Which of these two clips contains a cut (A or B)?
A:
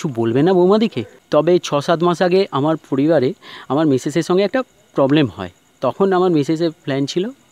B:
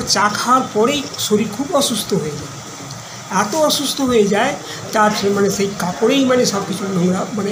A